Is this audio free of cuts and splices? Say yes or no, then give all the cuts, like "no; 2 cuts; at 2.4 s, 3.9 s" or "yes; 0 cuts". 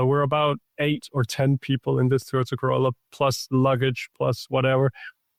yes; 0 cuts